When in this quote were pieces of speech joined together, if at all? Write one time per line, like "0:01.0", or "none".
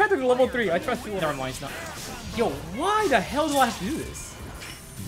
0:01.2